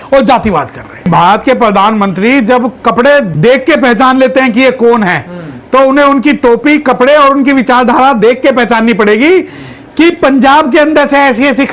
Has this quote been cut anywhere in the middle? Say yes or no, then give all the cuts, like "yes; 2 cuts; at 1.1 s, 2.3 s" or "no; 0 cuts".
yes; 1 cut; at 1.1 s